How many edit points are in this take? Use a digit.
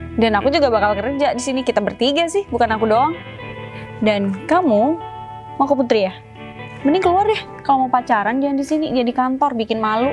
0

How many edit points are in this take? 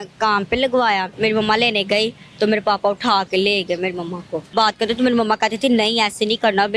2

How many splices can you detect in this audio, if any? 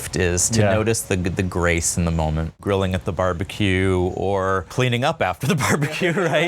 2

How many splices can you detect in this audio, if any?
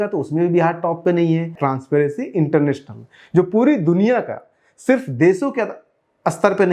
1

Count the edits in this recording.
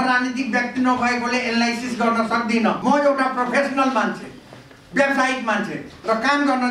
1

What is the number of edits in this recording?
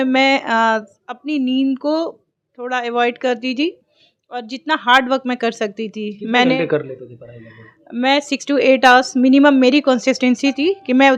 0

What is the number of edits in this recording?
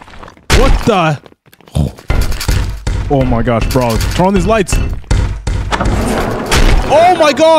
0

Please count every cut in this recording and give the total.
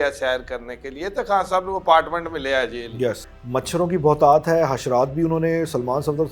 1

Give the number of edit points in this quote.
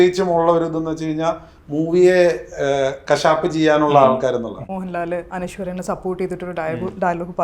2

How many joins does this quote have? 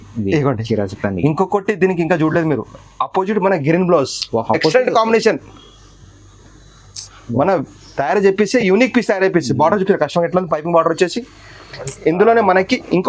0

